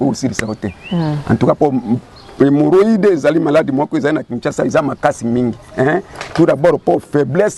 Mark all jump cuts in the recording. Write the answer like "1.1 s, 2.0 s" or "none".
none